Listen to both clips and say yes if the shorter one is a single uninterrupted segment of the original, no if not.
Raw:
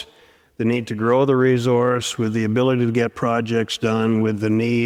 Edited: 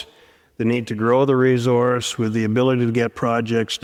yes